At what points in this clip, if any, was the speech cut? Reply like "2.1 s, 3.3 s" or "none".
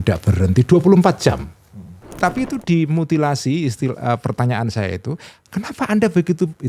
2.1 s